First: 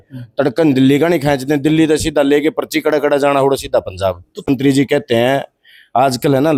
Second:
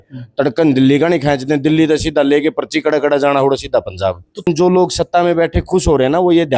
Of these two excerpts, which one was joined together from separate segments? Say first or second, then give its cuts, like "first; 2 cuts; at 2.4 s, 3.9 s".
second; 1 cut; at 4.5 s